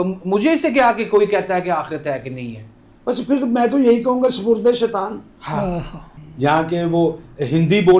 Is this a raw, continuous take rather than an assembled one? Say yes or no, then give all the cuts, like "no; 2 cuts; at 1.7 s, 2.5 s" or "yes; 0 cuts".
no; 1 cut; at 6.0 s